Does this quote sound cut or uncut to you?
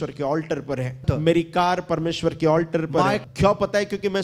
cut